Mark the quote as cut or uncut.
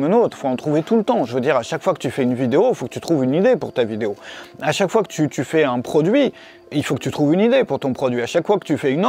uncut